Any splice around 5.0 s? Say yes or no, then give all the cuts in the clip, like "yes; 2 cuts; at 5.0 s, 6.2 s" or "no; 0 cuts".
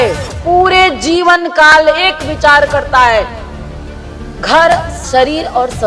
yes; 1 cut; at 5.0 s